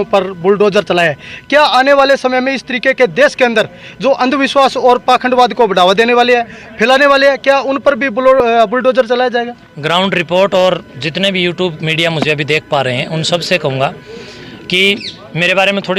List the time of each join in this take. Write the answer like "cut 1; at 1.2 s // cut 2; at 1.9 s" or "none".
none